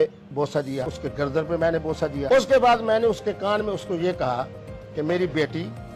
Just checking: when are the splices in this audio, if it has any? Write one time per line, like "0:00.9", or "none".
0:01.0
0:02.3